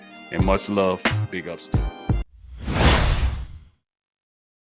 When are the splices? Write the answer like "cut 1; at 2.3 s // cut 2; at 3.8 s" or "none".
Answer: none